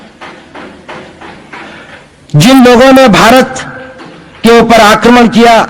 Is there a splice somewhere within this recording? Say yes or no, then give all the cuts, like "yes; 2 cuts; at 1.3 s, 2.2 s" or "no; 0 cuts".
no; 0 cuts